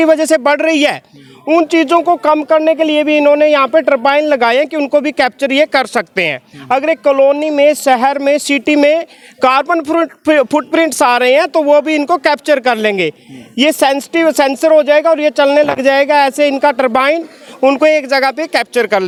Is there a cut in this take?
no; 0 cuts

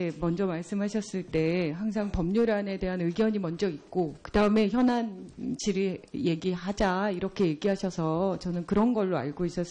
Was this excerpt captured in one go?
no; 1 cut; at 2.8 s

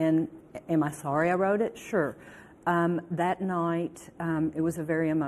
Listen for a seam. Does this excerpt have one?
no; 0 cuts

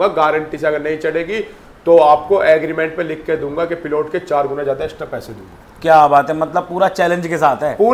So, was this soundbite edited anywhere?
no; 0 cuts

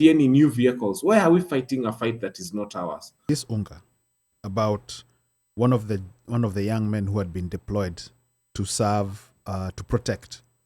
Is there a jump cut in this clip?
yes; 1 cut; at 3.3 s

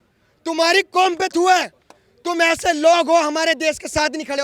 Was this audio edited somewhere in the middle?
no; 0 cuts

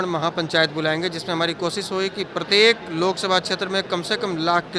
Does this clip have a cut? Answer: no; 0 cuts

